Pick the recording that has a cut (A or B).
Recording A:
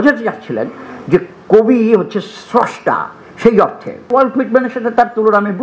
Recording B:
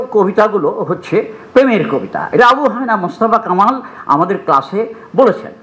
A